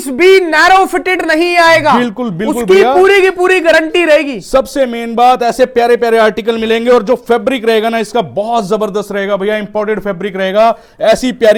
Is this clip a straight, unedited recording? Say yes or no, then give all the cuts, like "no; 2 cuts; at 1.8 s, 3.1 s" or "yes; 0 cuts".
yes; 0 cuts